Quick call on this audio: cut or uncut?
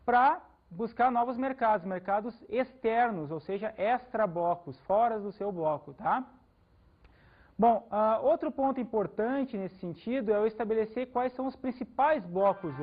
cut